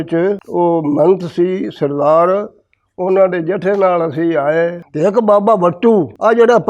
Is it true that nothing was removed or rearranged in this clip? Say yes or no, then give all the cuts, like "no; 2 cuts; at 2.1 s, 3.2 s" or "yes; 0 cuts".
no; 1 cut; at 4.8 s